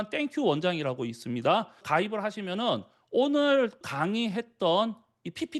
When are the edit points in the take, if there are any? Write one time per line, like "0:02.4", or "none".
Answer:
0:01.8
0:03.8